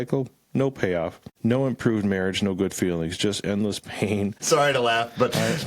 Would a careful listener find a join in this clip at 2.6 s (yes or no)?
no